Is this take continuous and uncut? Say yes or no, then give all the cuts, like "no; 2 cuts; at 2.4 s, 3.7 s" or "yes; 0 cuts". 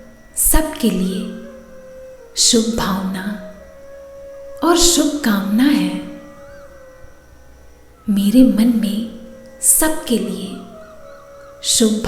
yes; 0 cuts